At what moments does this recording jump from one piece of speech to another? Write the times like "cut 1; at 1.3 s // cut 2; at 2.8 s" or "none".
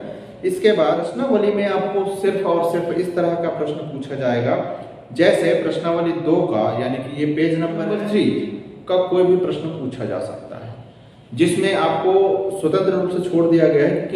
cut 1; at 1.1 s // cut 2; at 7.9 s